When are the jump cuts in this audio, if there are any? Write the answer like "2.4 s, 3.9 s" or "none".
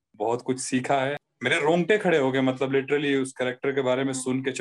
1.3 s